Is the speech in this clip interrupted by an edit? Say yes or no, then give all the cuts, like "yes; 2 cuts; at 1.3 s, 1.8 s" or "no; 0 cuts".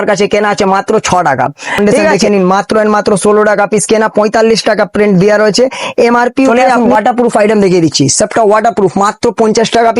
yes; 2 cuts; at 1.8 s, 6.5 s